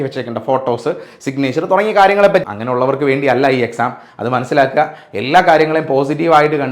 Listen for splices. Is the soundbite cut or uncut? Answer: cut